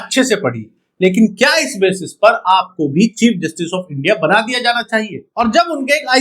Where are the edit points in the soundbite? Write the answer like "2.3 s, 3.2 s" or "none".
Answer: 5.2 s